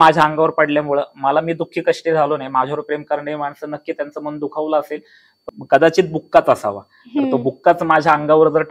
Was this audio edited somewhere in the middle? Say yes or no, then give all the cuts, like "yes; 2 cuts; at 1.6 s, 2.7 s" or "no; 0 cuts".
yes; 1 cut; at 5.5 s